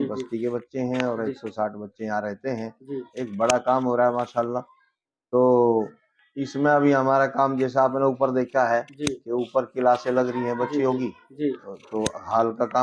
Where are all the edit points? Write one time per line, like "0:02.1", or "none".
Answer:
none